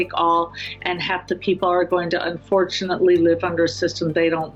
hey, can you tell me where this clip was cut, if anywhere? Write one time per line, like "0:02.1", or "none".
none